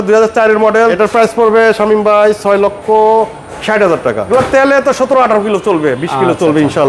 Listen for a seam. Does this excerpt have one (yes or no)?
yes